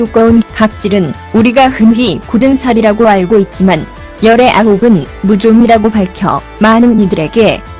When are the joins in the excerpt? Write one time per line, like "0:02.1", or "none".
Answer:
0:01.2